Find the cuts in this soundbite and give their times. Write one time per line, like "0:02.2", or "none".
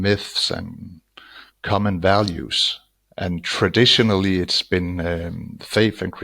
0:03.2